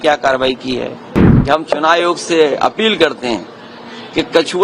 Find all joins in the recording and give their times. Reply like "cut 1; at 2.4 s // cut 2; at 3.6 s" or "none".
cut 1; at 1.3 s